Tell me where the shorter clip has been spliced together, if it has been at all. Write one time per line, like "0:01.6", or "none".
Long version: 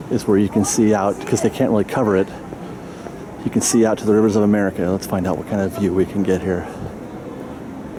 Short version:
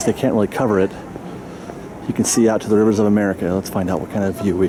none